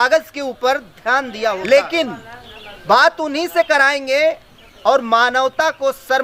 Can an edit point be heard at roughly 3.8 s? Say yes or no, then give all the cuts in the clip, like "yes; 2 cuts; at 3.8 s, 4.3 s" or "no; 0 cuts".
no; 1 cut; at 1.6 s